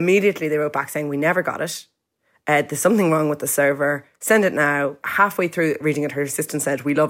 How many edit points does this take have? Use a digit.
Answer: 2